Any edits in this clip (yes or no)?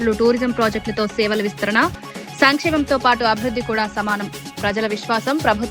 no